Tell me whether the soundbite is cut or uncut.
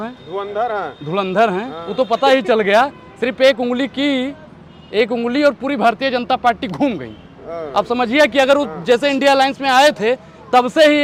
uncut